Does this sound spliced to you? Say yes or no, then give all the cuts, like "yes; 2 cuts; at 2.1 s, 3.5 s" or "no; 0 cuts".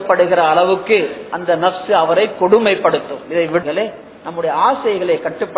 yes; 1 cut; at 3.6 s